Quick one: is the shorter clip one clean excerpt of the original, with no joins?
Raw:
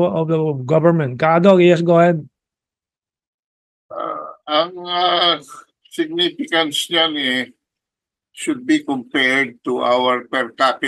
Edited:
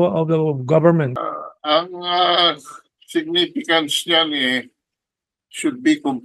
no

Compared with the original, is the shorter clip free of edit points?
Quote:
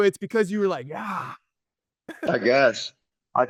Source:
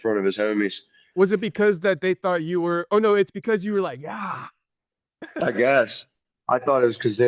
yes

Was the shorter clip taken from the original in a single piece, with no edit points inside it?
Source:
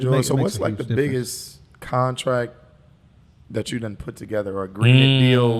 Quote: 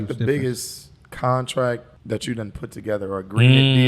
no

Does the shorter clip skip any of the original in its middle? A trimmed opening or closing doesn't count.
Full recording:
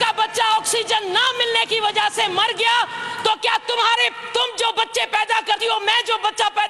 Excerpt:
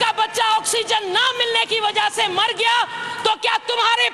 no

